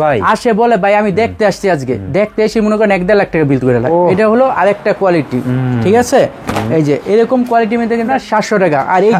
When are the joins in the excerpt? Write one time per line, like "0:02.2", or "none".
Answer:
0:03.9
0:08.1